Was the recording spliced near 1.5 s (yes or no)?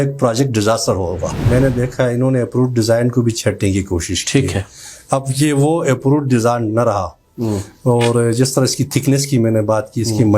yes